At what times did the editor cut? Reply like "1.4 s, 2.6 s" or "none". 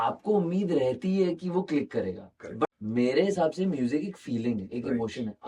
2.6 s